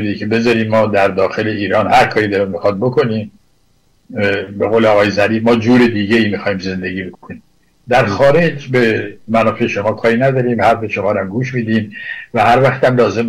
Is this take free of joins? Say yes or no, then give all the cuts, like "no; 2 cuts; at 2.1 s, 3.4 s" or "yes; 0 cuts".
yes; 0 cuts